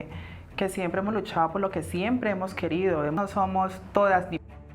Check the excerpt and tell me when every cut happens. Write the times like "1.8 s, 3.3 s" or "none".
3.2 s